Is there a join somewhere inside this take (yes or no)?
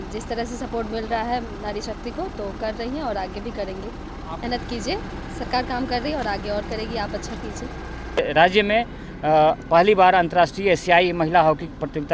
yes